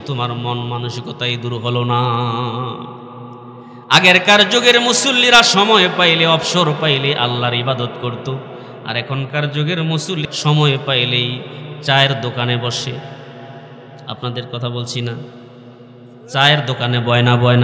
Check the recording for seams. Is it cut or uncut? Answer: cut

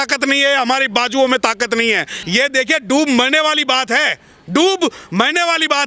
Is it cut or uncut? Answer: cut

